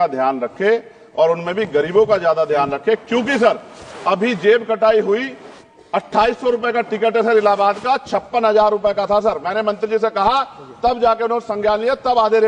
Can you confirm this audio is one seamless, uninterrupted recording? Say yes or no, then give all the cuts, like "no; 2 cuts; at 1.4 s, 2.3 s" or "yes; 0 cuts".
yes; 0 cuts